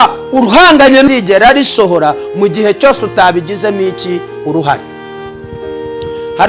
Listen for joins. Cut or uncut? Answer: cut